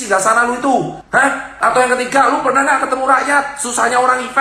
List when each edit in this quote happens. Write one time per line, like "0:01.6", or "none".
0:01.0